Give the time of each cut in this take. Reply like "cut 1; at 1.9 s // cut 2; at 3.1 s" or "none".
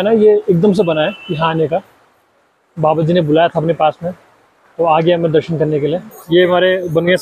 cut 1; at 6.2 s